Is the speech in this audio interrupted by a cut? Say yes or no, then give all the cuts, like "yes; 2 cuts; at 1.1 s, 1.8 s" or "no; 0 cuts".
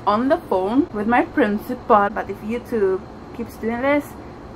yes; 2 cuts; at 0.9 s, 2.1 s